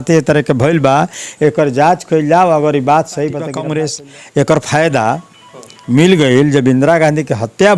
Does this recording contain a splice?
yes; 1 cut; at 3.6 s

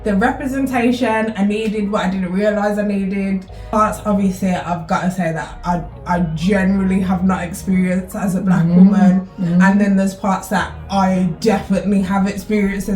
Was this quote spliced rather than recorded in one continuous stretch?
yes; 1 cut; at 3.7 s

